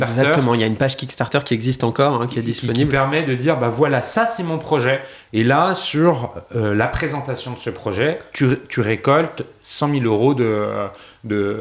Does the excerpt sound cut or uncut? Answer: cut